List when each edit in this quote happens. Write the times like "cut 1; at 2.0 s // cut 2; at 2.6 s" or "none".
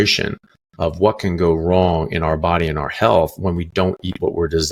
none